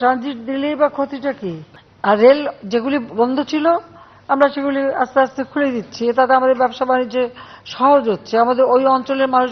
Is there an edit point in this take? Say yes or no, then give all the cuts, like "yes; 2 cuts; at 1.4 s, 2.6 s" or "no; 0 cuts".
no; 0 cuts